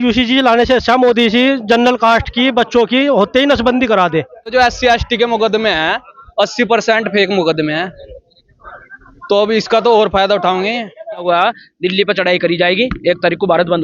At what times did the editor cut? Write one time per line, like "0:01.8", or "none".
0:04.5
0:11.2